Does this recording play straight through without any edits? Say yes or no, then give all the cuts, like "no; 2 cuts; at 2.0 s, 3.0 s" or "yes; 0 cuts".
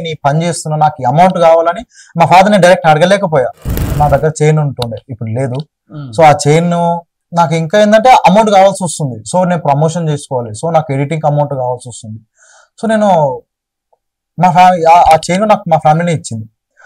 no; 1 cut; at 3.8 s